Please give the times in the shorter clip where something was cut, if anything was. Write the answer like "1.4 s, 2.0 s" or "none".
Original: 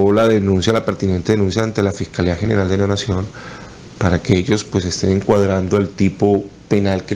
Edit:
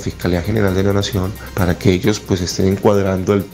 1.4 s

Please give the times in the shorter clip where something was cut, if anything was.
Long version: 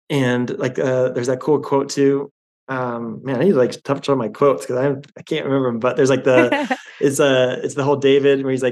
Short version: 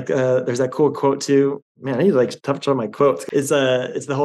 1.7 s, 3.2 s

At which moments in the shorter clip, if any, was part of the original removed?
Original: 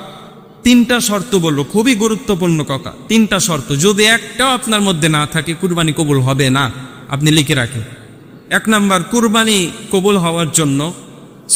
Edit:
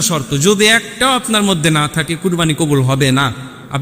none

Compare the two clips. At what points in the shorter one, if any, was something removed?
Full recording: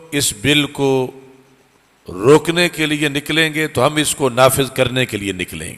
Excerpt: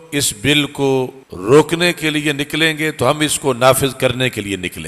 1.2 s

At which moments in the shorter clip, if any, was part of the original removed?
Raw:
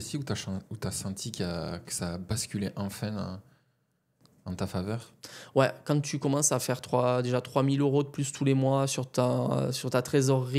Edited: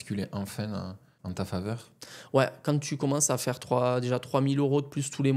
1.1 s

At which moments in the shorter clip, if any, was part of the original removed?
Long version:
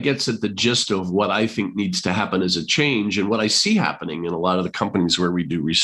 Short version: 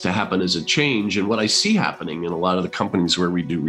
none

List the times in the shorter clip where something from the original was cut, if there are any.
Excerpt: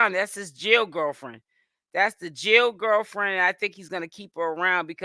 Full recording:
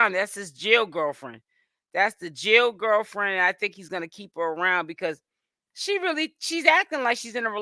none

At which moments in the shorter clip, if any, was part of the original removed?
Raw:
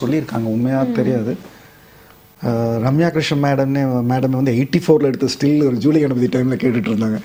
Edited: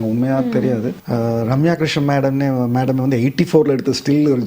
1.0 s

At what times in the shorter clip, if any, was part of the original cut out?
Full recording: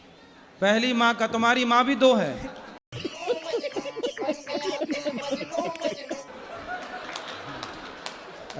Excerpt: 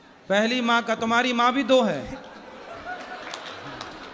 2.5 s

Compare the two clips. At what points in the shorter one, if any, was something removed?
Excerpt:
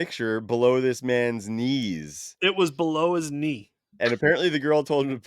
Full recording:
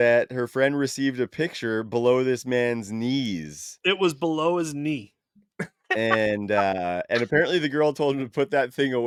3.9 s

